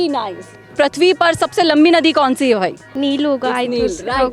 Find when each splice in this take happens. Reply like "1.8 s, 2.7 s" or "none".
0.7 s, 2.8 s